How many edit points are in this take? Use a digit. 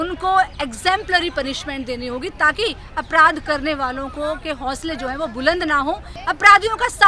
1